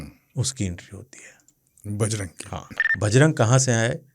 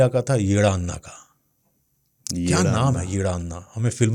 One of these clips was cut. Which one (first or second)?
first